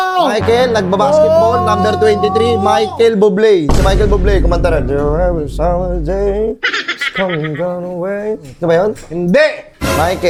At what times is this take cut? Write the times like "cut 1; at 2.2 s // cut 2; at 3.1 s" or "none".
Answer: none

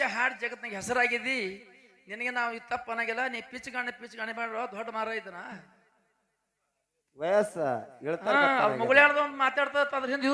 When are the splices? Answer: none

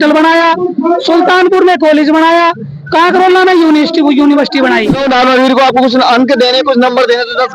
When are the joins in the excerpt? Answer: cut 1; at 5.0 s

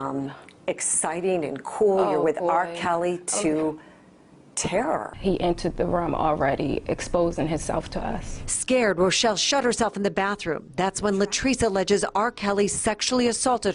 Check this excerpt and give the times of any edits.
none

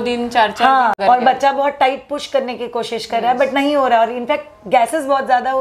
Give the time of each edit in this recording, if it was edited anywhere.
cut 1; at 1.0 s

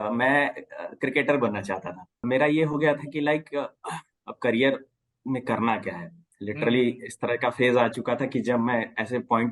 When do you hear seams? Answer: cut 1; at 2.3 s

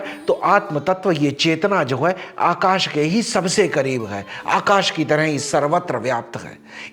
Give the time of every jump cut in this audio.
none

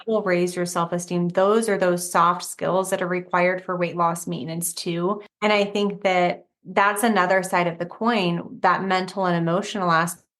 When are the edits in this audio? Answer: cut 1; at 5.2 s

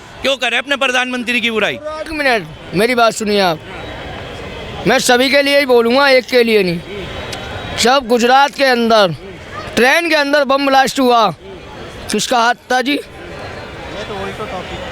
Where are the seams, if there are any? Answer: cut 1; at 2.1 s

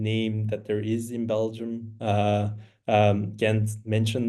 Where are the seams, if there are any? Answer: none

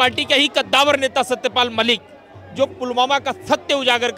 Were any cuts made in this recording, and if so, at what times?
none

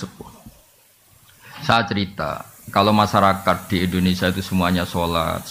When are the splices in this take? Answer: none

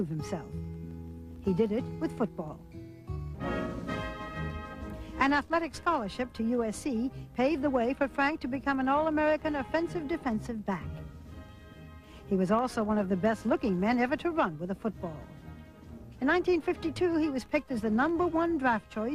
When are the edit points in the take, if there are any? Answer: none

